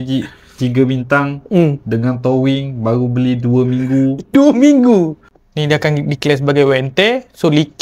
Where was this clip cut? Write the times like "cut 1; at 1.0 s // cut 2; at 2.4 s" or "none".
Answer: cut 1; at 5.2 s